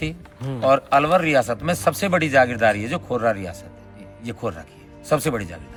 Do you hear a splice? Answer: no; 0 cuts

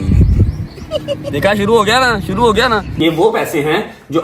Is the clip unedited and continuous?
no; 2 cuts; at 1.2 s, 2.9 s

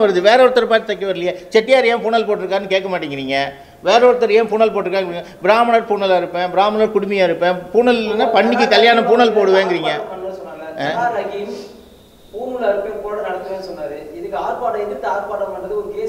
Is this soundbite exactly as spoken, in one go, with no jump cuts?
yes; 0 cuts

